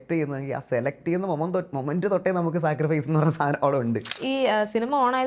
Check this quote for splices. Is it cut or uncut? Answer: cut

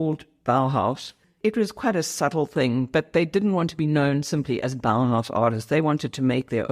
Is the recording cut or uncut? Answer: uncut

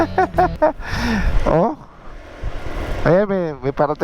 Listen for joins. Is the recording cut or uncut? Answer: cut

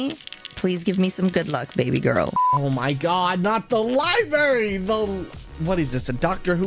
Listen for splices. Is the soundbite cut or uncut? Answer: cut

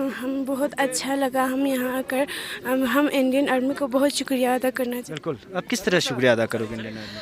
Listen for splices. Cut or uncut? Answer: cut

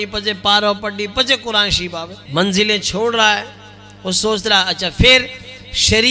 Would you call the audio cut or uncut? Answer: cut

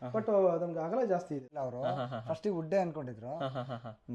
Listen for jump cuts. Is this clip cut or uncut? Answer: cut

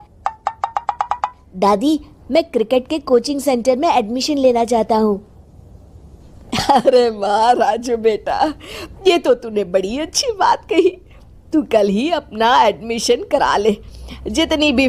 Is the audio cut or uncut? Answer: uncut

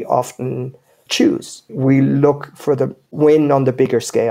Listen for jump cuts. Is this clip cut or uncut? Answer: cut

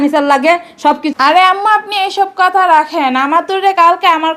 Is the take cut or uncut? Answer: cut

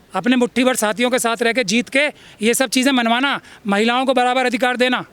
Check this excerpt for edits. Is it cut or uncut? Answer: uncut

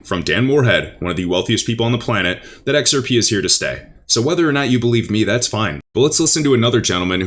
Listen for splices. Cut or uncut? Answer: uncut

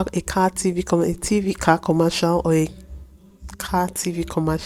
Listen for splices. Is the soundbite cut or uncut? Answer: uncut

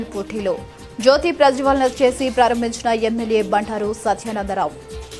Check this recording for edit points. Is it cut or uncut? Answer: uncut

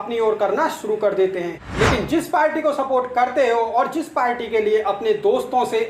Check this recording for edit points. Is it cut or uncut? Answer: cut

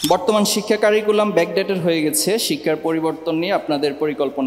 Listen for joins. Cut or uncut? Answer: uncut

